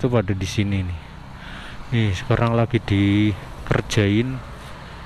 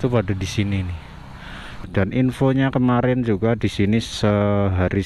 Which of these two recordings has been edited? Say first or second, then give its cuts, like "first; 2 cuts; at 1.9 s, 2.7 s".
second; 1 cut; at 1.9 s